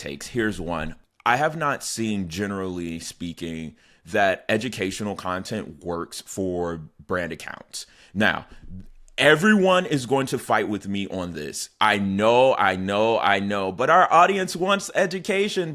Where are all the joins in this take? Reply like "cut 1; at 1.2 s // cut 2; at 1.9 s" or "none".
cut 1; at 0.9 s